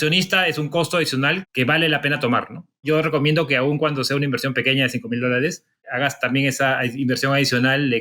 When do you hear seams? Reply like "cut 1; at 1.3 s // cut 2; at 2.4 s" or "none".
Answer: cut 1; at 1.4 s // cut 2; at 2.8 s // cut 3; at 5.8 s